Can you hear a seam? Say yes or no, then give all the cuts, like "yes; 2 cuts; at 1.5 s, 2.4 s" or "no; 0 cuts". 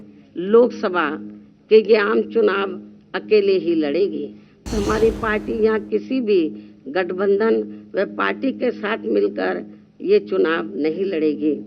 yes; 1 cut; at 4.6 s